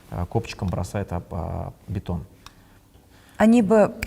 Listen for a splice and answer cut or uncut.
cut